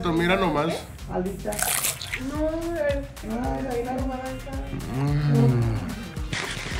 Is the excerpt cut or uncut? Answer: uncut